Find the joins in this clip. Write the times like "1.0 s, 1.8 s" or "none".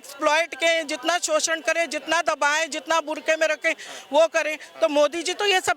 none

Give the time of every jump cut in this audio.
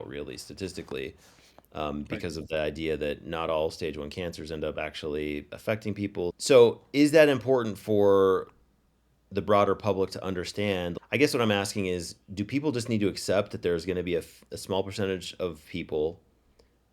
6.4 s, 10.9 s

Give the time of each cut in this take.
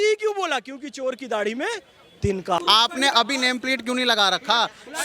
2.6 s

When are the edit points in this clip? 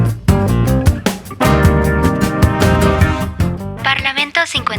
3.8 s

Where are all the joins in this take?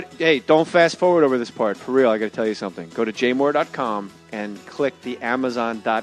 1.8 s

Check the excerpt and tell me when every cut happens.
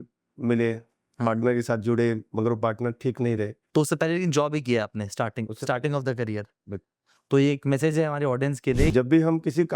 3.6 s, 8.9 s

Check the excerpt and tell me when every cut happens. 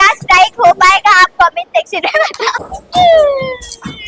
none

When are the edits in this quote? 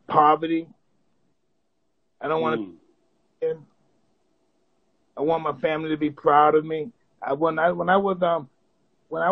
none

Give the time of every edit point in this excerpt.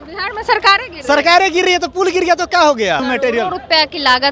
3.0 s

